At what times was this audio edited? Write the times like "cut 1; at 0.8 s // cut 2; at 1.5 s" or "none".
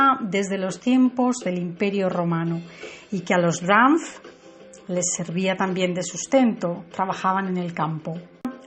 none